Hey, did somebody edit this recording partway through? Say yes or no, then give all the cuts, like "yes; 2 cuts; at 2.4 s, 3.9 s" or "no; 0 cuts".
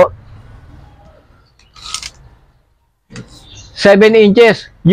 no; 0 cuts